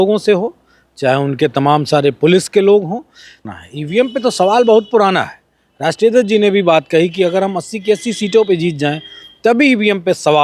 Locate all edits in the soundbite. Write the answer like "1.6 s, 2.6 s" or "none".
3.4 s